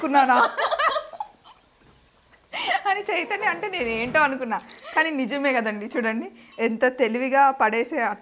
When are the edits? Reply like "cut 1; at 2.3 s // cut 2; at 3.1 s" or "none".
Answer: none